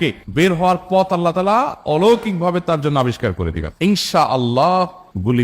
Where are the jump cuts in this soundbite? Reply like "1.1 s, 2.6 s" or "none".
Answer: 3.7 s